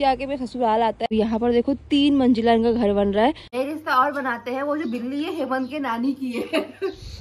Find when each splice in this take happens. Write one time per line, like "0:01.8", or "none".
0:01.1
0:03.4